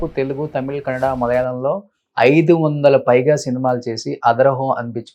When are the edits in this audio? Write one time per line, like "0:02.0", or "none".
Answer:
none